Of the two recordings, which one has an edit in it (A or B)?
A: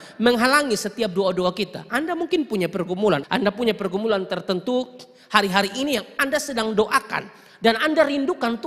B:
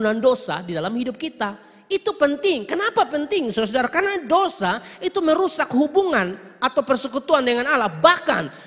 A